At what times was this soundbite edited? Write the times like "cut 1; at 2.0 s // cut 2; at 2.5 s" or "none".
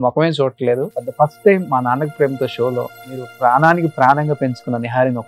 cut 1; at 1.0 s // cut 2; at 3.3 s